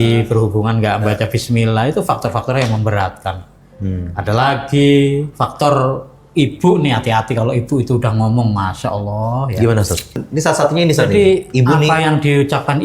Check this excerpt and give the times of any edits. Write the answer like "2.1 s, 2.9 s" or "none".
10.2 s